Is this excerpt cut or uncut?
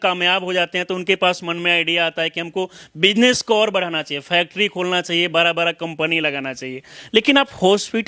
uncut